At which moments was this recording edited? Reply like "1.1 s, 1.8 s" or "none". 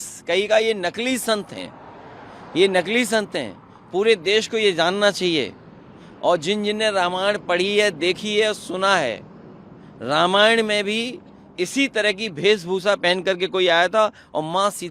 none